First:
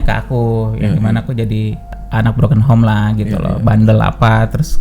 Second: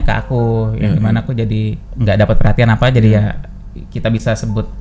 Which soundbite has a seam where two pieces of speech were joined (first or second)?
first